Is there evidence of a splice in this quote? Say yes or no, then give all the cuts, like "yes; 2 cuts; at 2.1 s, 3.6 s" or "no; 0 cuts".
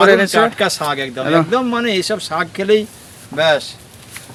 no; 0 cuts